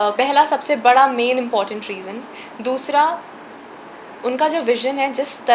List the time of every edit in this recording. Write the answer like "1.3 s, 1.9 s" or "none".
none